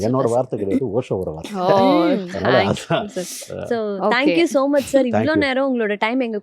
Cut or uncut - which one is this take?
uncut